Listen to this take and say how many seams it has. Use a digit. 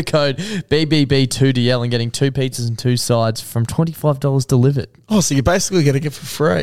0